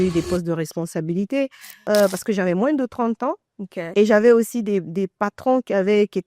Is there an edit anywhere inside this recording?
yes; 1 cut; at 1.7 s

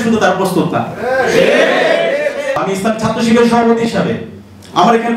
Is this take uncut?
no; 1 cut; at 2.6 s

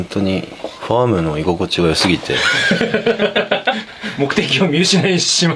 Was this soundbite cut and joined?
yes; 1 cut; at 2.2 s

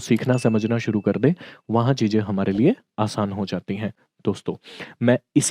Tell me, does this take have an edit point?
no; 0 cuts

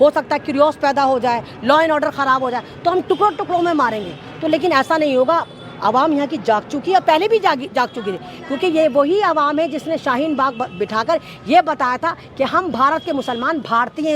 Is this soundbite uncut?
yes; 0 cuts

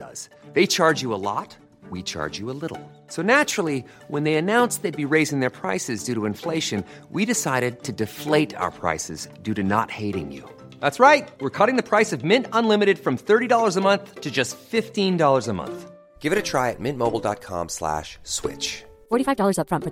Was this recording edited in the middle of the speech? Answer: no; 0 cuts

